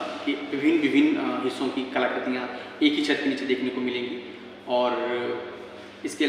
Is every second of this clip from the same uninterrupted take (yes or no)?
yes